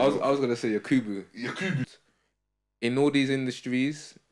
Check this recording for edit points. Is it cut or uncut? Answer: cut